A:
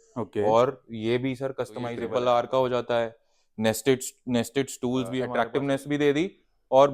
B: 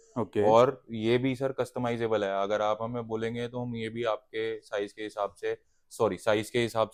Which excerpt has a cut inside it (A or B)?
A